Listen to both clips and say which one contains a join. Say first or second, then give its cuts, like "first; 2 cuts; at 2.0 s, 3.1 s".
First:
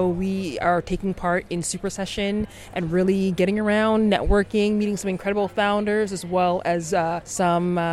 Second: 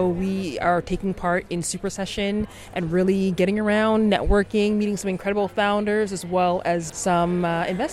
second; 1 cut; at 6.9 s